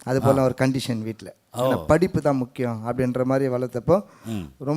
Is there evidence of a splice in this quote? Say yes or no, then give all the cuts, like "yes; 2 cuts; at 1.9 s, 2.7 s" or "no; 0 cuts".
no; 0 cuts